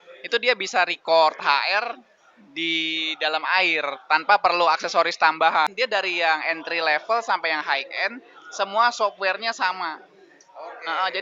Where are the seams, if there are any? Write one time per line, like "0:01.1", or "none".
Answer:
0:05.7